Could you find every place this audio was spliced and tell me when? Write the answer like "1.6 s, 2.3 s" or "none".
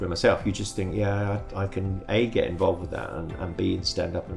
none